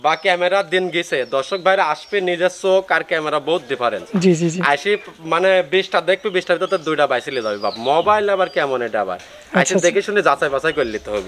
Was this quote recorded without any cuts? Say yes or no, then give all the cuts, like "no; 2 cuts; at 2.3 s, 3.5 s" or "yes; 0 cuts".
yes; 0 cuts